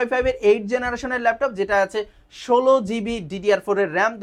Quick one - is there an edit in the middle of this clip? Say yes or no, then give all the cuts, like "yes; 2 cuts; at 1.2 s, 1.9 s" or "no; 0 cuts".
no; 0 cuts